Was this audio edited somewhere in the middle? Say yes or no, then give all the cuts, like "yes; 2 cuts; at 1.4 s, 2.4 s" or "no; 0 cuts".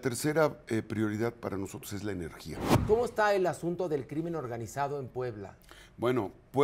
yes; 1 cut; at 2.7 s